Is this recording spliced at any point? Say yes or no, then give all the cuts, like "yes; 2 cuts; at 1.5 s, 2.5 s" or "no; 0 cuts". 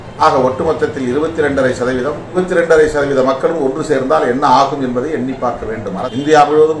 yes; 2 cuts; at 2.4 s, 6.0 s